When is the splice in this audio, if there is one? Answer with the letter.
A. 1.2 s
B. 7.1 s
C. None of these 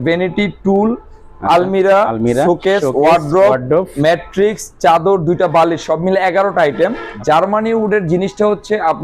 B